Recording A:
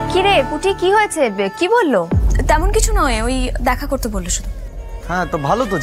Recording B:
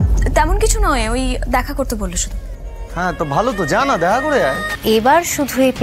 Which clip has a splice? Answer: B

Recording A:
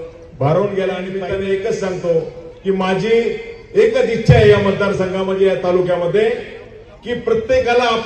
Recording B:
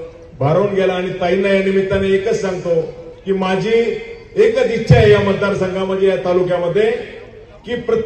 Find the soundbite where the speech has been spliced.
A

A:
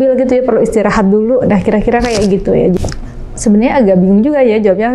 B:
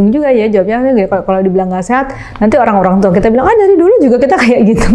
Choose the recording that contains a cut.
A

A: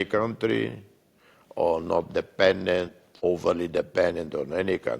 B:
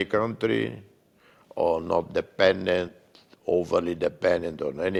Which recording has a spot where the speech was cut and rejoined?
A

